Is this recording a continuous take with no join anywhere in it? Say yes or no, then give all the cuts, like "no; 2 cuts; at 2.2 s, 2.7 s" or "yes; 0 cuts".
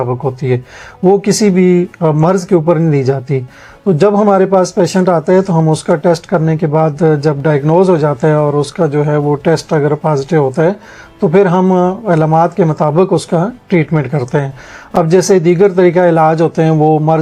yes; 0 cuts